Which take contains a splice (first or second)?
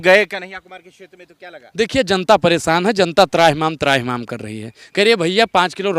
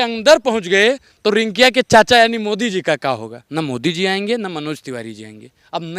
second